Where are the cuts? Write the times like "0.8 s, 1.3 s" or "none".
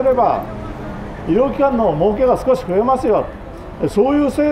none